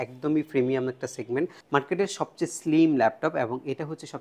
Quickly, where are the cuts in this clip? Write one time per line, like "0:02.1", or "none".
0:01.6